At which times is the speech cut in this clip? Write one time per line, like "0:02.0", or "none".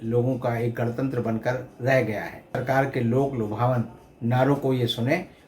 0:02.6